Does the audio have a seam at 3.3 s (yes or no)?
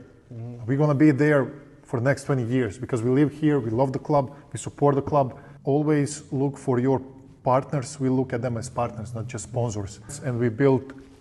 no